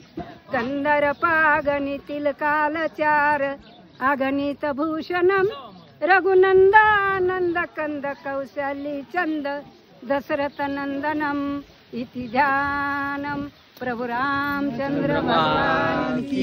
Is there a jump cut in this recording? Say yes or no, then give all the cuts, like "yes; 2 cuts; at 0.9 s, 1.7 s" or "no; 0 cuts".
no; 0 cuts